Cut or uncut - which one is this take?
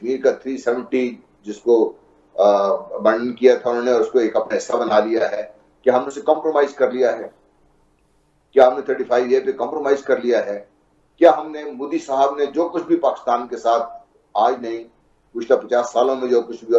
uncut